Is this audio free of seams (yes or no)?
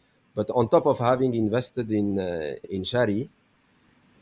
no